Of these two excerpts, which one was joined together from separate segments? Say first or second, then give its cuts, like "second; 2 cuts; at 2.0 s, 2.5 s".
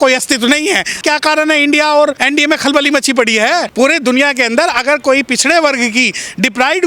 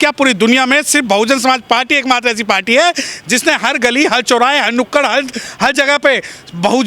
first; 3 cuts; at 0.9 s, 2.2 s, 3.7 s